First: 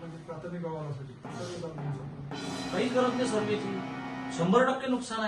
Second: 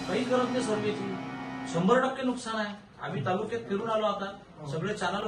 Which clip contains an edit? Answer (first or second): first